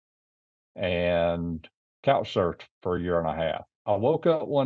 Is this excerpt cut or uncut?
cut